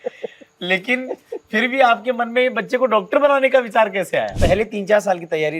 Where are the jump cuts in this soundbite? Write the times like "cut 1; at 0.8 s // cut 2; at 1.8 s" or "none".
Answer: cut 1; at 4.3 s

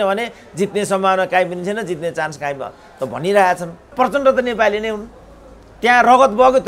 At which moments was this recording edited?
cut 1; at 3.9 s

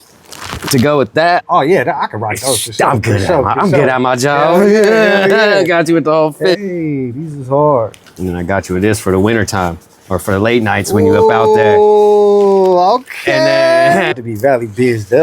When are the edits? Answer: cut 1; at 1.4 s // cut 2; at 6.5 s // cut 3; at 8.2 s // cut 4; at 14.1 s

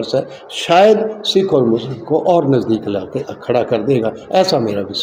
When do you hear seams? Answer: none

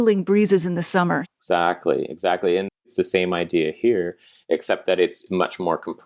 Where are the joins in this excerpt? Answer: cut 1; at 1.3 s // cut 2; at 2.9 s

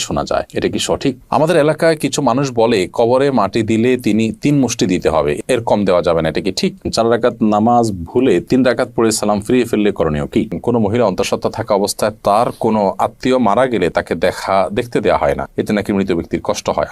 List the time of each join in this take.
cut 1; at 1.2 s // cut 2; at 6.9 s // cut 3; at 10.6 s

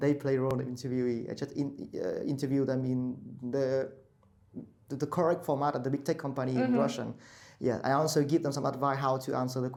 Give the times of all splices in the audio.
none

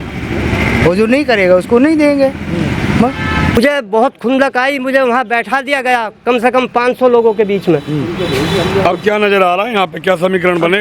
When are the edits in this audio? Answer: cut 1; at 3.6 s

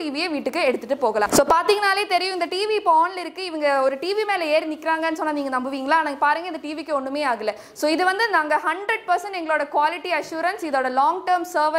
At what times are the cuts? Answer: cut 1; at 1.3 s

